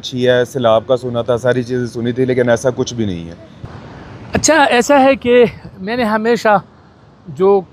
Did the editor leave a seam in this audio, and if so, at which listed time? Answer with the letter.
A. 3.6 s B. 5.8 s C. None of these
A